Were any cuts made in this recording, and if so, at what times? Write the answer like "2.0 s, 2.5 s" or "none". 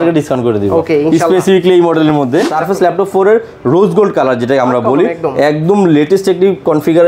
2.5 s